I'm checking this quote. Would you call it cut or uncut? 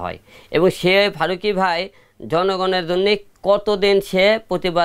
uncut